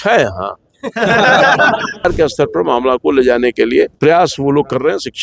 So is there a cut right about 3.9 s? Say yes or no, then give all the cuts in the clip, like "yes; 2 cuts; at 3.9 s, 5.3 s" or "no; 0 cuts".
yes; 2 cuts; at 2.0 s, 3.9 s